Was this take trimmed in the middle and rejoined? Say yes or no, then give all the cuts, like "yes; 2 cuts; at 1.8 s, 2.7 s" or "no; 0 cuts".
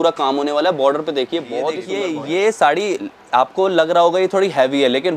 yes; 1 cut; at 1.9 s